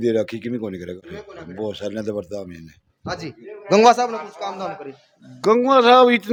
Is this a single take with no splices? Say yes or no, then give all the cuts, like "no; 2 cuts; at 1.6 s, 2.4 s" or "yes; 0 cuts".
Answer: yes; 0 cuts